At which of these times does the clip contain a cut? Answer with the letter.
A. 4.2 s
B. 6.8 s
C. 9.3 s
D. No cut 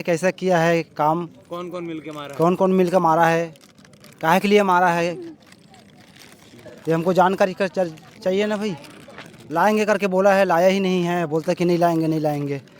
C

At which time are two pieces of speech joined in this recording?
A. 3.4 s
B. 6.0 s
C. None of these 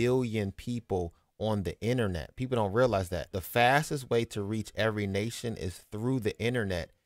A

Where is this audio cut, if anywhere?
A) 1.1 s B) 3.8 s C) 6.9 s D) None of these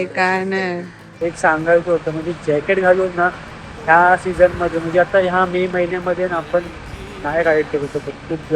A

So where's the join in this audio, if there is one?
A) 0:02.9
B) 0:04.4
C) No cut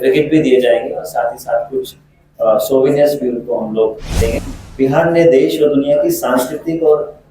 B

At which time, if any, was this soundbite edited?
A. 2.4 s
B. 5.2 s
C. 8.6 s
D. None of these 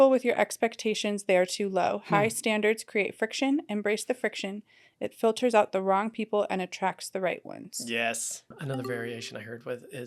C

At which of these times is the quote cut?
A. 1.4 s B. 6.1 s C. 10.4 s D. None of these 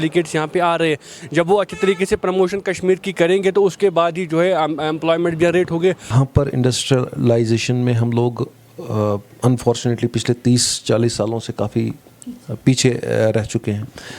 B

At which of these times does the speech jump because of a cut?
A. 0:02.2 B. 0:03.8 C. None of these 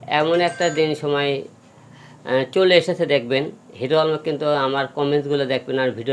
C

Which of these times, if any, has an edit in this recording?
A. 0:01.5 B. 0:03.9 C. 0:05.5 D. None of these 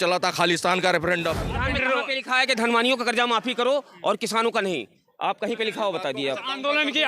A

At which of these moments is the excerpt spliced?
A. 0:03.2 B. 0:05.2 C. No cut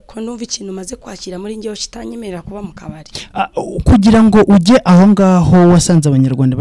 C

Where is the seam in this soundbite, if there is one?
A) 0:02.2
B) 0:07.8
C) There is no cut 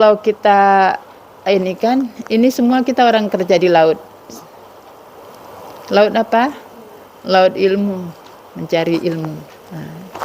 C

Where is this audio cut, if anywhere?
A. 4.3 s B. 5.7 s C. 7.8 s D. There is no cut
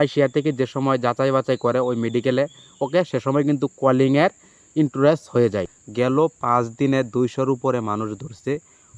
B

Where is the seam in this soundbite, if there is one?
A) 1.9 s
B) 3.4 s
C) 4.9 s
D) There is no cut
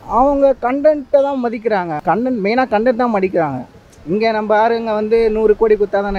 A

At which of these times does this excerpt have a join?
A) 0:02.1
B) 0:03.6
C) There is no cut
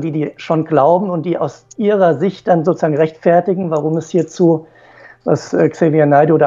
C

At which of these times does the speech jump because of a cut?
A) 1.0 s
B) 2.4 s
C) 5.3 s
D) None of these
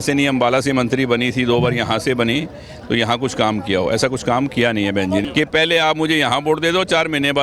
C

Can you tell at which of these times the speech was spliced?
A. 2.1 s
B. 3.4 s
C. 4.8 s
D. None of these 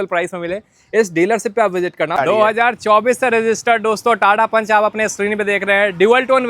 A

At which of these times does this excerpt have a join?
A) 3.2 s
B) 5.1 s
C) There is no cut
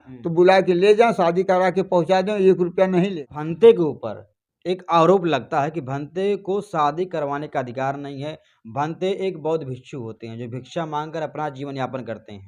A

